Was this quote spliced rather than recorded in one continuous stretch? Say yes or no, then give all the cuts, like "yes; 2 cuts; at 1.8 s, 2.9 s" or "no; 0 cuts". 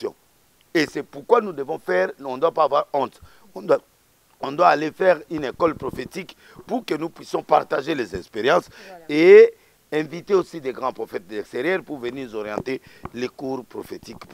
no; 0 cuts